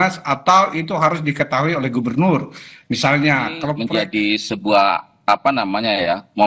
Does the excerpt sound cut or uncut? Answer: cut